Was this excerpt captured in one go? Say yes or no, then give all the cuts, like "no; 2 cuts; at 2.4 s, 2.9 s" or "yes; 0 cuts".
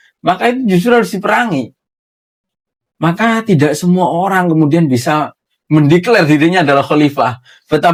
yes; 0 cuts